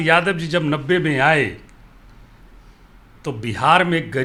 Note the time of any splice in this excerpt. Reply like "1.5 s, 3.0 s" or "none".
none